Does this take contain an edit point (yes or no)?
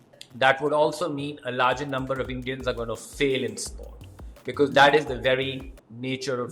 no